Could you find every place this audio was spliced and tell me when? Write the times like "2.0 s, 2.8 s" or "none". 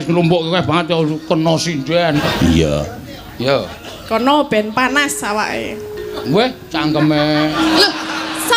2.2 s

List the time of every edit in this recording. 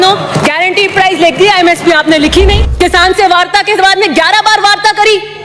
2.6 s

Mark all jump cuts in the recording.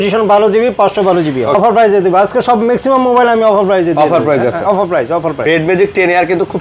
1.6 s, 5.5 s

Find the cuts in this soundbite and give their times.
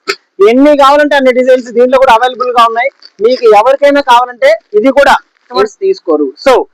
5.7 s

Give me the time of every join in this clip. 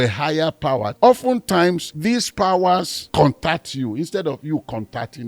0.9 s, 1.9 s, 3.0 s

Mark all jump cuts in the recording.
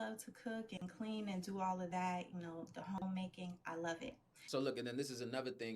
4.4 s

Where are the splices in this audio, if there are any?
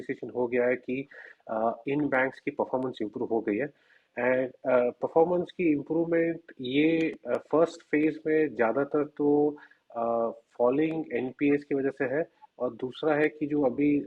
none

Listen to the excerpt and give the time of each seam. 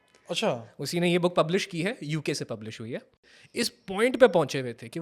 3.4 s

